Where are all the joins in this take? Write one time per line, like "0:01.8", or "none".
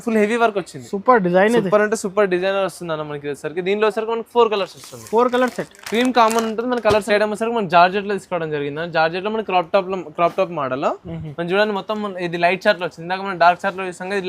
0:07.0

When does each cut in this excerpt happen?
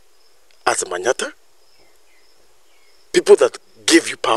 none

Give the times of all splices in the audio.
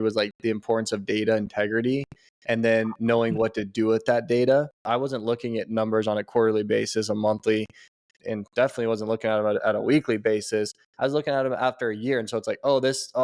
0:04.8

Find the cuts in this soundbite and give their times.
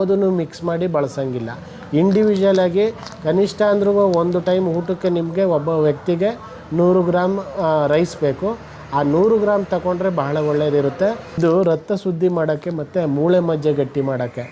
0:11.4

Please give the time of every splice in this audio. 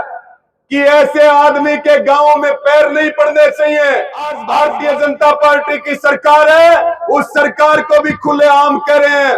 0:04.4

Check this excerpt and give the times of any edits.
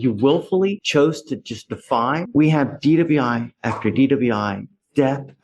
0:02.2

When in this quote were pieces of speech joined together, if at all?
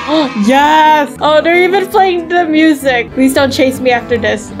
0:01.1
0:03.1

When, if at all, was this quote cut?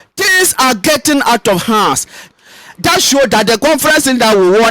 0:02.2

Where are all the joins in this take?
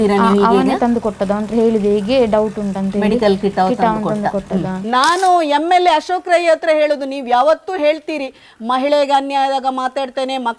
0:04.8

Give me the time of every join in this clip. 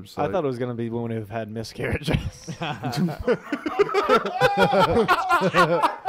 none

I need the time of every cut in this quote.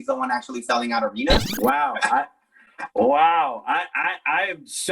0:01.5

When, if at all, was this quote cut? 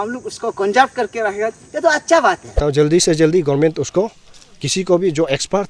0:02.6

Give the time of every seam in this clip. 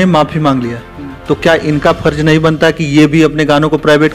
none

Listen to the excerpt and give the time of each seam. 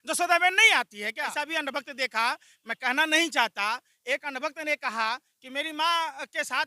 0:01.2

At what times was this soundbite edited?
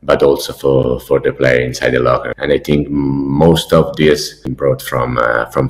0:02.3
0:04.4

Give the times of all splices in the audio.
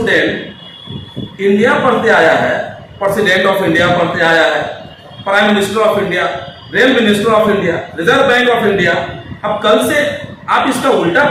none

